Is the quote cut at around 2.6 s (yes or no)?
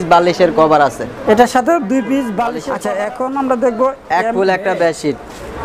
yes